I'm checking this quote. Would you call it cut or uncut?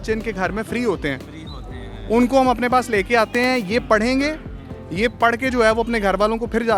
uncut